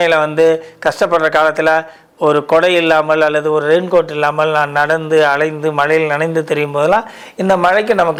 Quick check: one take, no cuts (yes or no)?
yes